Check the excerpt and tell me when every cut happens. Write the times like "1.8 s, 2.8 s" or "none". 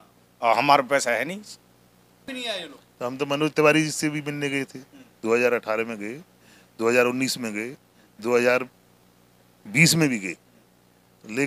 2.2 s